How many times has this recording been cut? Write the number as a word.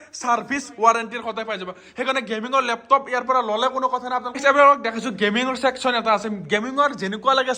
one